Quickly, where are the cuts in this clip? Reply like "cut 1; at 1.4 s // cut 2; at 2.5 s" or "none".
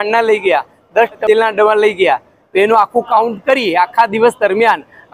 cut 1; at 1.2 s